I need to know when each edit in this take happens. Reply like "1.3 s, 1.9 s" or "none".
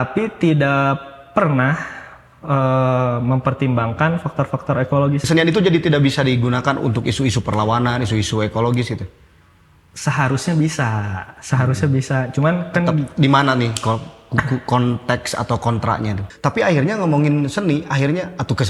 5.2 s, 16.3 s